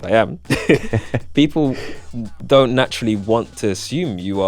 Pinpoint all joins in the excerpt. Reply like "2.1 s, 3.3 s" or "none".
none